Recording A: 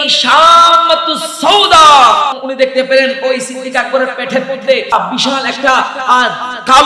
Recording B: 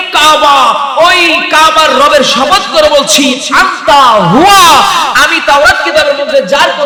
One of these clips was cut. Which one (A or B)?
A